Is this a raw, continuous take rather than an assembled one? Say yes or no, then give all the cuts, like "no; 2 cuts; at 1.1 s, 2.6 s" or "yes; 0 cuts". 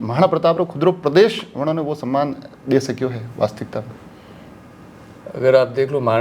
yes; 0 cuts